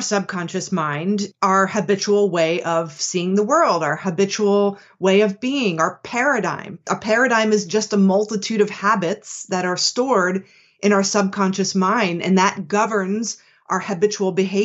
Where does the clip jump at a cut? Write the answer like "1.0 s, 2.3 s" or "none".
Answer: 1.3 s, 6.8 s

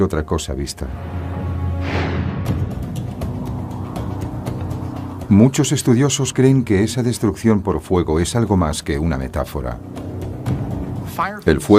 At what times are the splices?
1.5 s

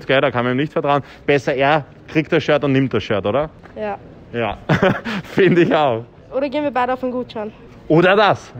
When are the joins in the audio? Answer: 6.2 s

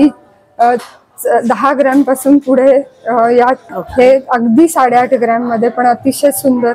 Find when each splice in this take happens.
3.7 s

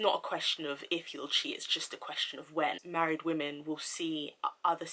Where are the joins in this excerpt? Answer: 2.8 s

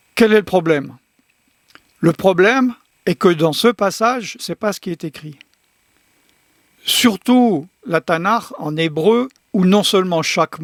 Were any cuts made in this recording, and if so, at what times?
none

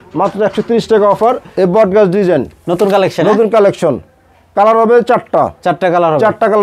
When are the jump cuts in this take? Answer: 1.5 s

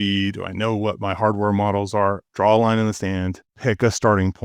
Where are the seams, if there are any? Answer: 2.3 s, 3.4 s

